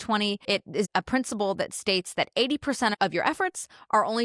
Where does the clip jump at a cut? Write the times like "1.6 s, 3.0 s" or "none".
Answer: 0.8 s, 2.9 s